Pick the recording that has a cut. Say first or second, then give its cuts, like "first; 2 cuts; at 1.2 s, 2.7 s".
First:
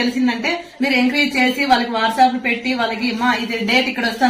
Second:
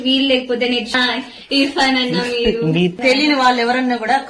second; 1 cut; at 0.9 s